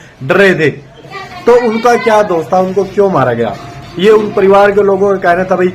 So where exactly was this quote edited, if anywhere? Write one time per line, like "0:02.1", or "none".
0:01.1